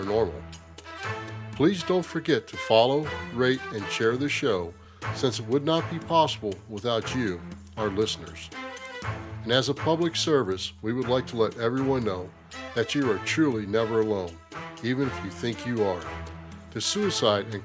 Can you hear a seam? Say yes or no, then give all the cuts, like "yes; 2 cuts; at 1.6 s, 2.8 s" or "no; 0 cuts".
yes; 1 cut; at 10.7 s